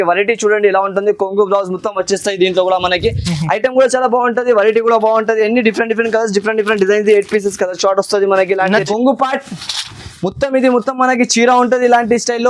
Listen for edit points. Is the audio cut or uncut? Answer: cut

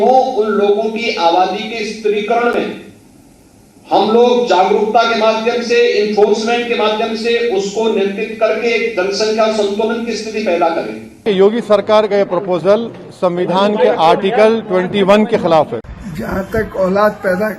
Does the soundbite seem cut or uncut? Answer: cut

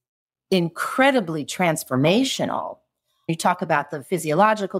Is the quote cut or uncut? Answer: cut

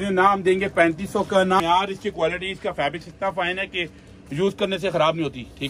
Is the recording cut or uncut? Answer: cut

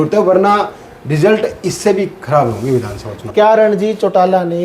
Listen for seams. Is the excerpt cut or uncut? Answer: cut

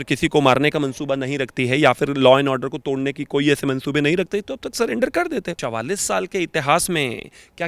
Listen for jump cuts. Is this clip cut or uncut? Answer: cut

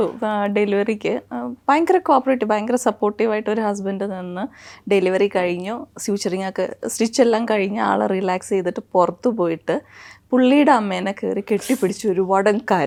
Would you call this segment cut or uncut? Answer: uncut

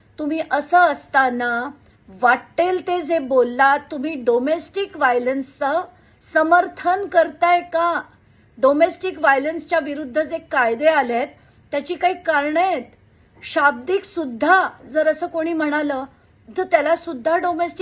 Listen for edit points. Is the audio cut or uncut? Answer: uncut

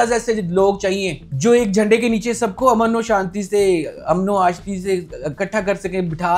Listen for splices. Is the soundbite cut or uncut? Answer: uncut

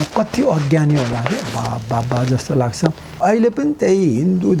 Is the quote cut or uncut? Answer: cut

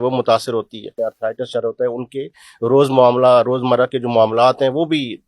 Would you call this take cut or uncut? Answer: cut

